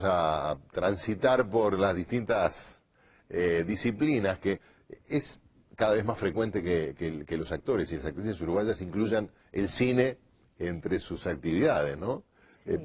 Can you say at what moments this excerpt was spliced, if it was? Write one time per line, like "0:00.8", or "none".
0:08.6